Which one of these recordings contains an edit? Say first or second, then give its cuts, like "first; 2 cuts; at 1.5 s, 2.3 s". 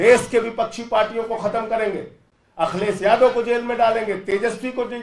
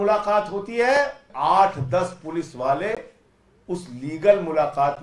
second; 1 cut; at 1.3 s